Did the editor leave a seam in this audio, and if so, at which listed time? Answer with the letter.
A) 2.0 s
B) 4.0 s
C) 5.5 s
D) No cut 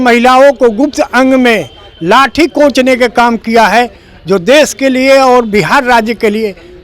D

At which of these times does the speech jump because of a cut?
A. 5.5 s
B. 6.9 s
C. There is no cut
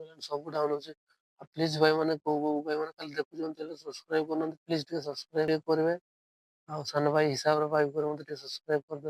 A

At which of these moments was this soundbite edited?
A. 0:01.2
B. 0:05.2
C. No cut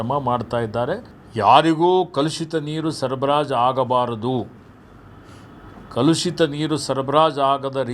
A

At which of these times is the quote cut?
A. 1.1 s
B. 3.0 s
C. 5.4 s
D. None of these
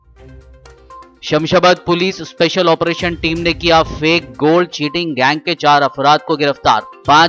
D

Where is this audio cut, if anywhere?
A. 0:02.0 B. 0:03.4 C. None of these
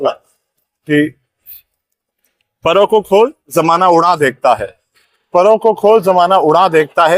C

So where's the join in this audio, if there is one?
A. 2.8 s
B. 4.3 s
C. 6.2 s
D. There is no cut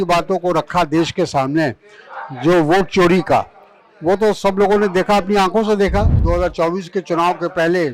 C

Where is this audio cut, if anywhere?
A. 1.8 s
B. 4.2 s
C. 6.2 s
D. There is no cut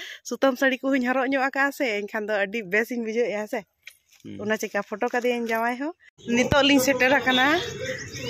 C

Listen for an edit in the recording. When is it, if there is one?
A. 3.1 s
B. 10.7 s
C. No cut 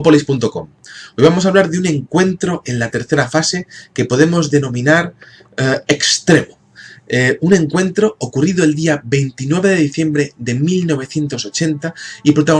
C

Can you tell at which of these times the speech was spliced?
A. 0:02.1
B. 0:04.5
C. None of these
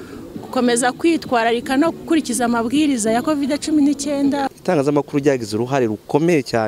B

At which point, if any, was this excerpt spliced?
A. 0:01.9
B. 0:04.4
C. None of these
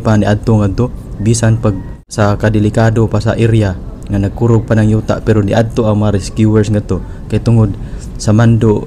A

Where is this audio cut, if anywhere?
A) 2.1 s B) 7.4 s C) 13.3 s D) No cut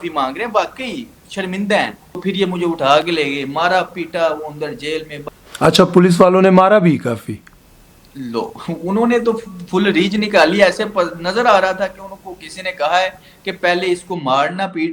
A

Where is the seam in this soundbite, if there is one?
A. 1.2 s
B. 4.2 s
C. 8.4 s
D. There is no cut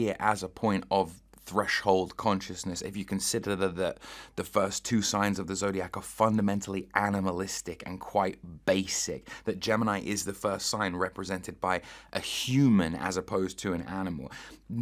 D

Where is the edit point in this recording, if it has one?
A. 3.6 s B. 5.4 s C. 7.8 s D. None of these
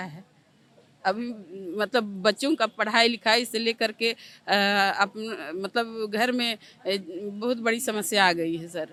D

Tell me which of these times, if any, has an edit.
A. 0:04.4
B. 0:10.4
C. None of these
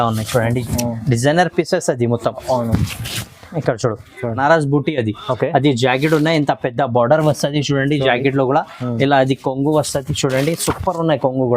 A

